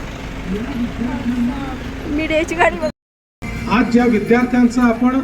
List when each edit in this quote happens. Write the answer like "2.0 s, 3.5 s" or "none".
2.9 s